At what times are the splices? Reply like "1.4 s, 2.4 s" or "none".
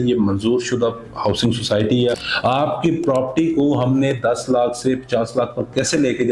2.2 s